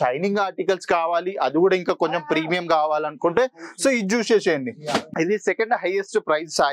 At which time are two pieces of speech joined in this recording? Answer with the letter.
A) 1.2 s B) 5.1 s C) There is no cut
B